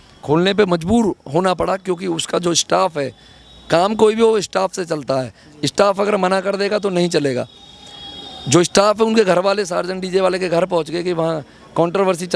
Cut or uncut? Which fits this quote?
uncut